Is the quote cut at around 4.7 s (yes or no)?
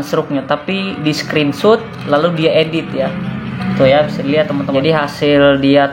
yes